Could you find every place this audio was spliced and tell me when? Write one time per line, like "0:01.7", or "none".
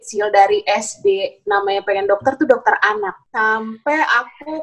0:03.2